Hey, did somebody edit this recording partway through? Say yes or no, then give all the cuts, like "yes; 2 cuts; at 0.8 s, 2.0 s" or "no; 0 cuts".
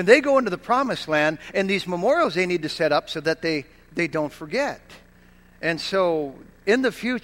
no; 0 cuts